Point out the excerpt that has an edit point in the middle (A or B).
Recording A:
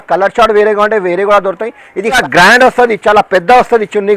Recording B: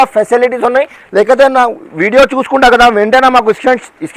A